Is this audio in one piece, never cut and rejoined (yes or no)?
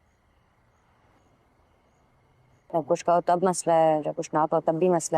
no